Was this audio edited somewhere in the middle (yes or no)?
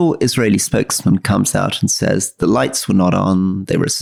no